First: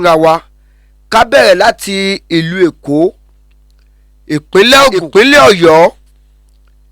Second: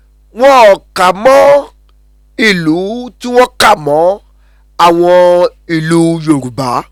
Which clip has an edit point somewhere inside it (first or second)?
first